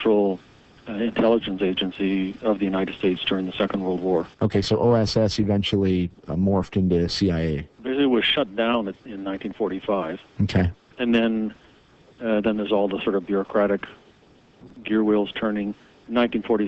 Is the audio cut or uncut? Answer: cut